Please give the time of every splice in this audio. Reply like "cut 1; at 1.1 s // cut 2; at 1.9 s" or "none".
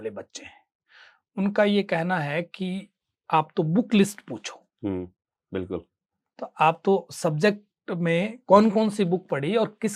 none